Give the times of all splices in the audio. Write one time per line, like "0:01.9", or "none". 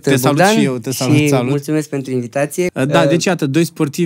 0:02.7